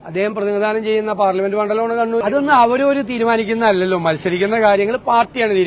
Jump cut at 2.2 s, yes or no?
yes